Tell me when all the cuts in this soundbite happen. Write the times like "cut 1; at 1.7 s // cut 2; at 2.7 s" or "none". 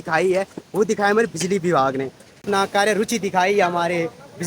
cut 1; at 2.3 s